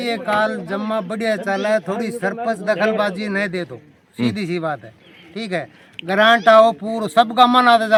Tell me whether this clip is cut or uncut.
uncut